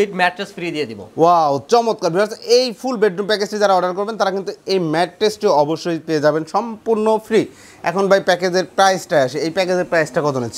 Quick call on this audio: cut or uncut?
uncut